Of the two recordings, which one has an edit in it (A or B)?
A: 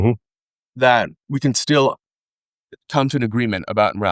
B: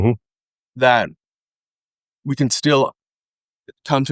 A